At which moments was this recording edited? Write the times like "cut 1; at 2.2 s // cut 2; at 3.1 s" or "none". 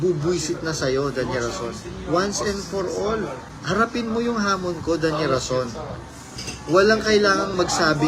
cut 1; at 3.5 s